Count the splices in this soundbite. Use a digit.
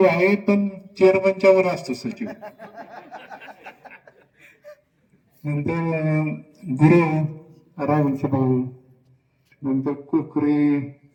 0